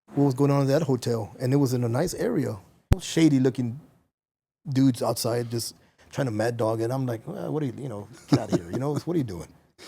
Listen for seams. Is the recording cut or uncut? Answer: cut